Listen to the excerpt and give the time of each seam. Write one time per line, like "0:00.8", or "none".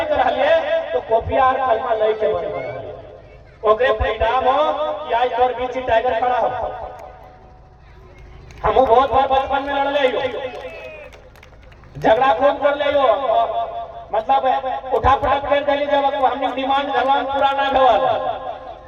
none